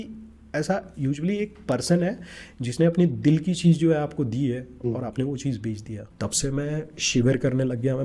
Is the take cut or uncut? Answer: cut